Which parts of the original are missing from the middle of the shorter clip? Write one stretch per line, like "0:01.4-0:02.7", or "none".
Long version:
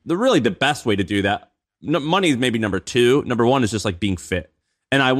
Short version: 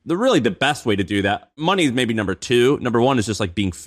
0:01.6-0:02.0

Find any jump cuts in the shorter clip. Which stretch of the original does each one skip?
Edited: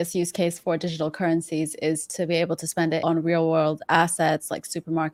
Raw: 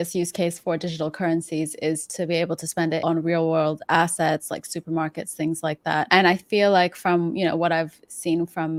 none

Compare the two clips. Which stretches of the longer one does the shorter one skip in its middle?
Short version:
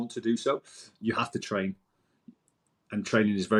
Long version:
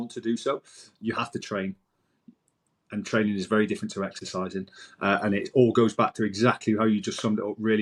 none

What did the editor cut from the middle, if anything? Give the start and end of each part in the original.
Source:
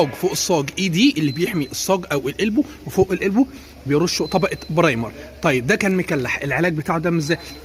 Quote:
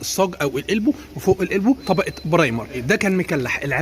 0:03.5-0:04.3
0:05.3-0:05.6

